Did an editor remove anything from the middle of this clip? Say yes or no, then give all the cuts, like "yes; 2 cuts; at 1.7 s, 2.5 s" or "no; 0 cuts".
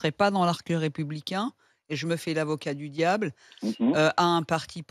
no; 0 cuts